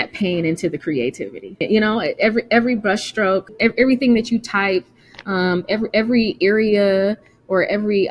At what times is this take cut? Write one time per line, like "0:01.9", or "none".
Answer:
0:01.6
0:03.5